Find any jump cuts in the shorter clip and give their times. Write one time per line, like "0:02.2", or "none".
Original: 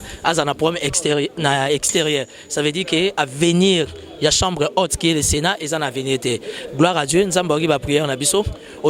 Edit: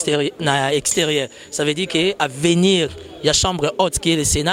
none